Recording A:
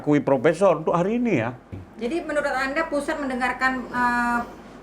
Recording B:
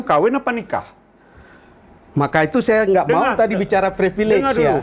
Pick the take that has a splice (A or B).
A